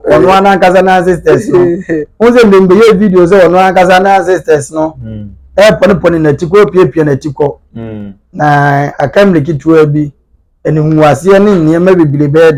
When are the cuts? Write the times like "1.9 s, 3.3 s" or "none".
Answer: none